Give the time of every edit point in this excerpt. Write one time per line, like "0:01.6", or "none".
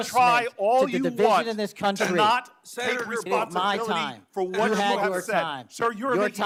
none